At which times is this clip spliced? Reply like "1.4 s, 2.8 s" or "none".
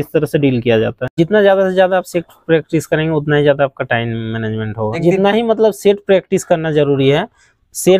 1.1 s, 5.0 s